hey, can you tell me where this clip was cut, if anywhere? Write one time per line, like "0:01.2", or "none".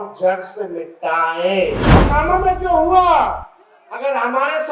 0:02.0

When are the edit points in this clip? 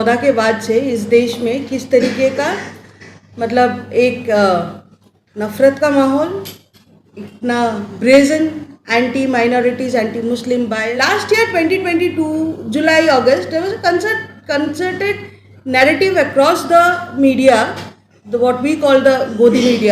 0:10.8

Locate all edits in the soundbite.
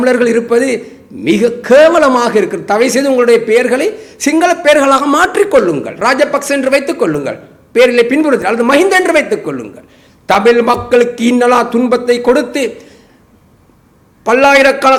none

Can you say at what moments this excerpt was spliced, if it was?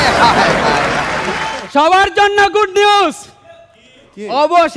0:01.5

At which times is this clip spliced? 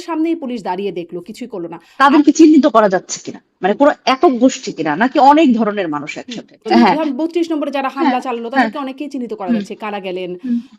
0:01.8
0:06.5

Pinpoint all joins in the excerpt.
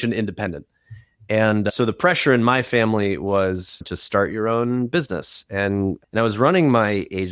0:01.7
0:03.8
0:06.0

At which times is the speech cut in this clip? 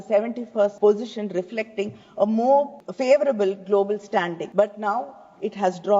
0:00.7
0:02.8
0:04.4

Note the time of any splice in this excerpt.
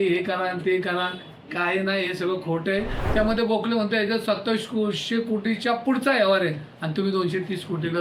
0:03.0

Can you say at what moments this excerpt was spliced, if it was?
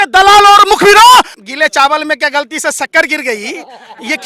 0:01.4

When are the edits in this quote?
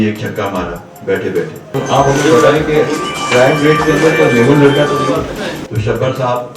0:01.7
0:05.6

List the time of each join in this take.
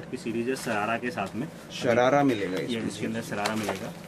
none

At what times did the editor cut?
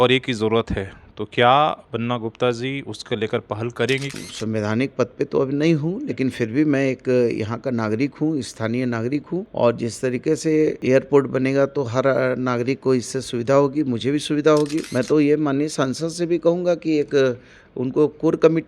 0:04.1
0:09.5
0:10.8
0:14.8

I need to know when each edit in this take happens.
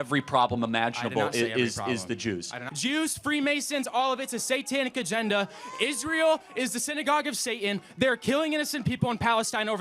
0:02.7

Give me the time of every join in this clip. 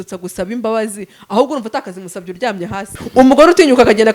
0:03.0

